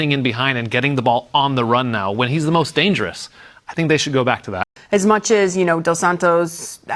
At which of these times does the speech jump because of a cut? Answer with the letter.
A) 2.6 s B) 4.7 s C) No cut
B